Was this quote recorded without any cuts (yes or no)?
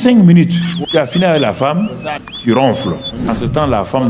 no